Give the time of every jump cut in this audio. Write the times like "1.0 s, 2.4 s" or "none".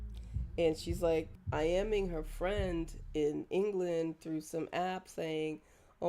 1.4 s